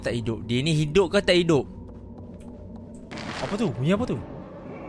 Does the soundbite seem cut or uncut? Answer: cut